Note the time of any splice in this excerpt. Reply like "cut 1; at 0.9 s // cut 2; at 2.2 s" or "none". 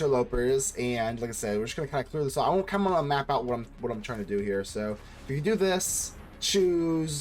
none